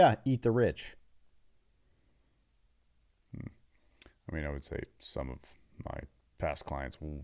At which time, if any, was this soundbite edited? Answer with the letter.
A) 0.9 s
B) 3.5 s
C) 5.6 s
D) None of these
D